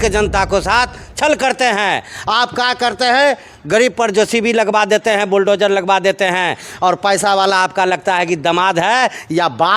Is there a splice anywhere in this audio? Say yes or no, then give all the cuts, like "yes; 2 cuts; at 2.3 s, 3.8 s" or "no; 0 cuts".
no; 0 cuts